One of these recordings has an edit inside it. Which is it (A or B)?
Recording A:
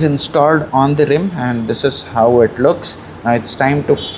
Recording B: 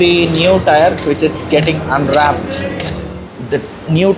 B